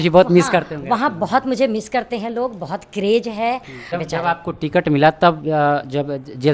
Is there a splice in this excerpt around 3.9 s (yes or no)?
yes